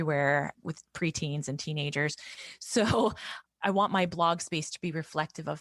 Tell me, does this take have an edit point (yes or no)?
no